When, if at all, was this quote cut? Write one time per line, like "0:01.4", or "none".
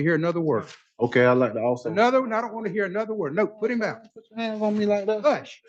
none